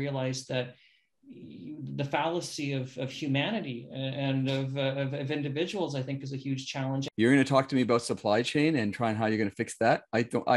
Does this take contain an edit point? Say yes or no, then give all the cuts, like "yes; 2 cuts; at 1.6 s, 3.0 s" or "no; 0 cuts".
yes; 1 cut; at 7.0 s